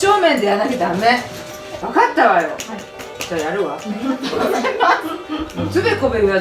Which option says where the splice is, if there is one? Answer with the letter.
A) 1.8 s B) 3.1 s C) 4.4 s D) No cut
A